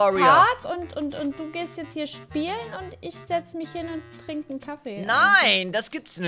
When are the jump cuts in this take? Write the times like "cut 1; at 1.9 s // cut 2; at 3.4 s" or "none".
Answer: none